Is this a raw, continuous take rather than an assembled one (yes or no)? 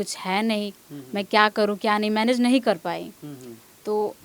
yes